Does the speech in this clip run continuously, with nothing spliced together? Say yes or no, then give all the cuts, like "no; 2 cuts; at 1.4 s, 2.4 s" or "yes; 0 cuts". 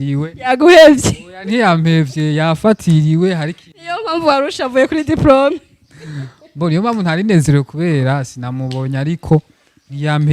yes; 0 cuts